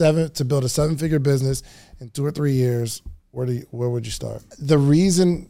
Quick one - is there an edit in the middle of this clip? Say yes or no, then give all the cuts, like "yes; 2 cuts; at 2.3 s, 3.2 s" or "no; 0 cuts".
yes; 1 cut; at 4.4 s